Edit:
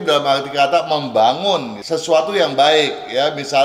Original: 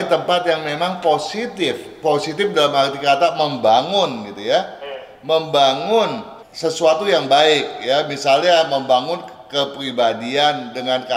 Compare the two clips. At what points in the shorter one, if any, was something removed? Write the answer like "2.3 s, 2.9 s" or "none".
1.8 s